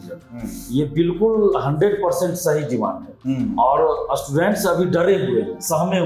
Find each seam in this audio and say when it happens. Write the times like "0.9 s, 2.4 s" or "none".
none